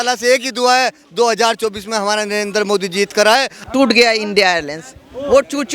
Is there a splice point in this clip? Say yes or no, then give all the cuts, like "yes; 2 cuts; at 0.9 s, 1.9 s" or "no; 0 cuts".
yes; 1 cut; at 3.5 s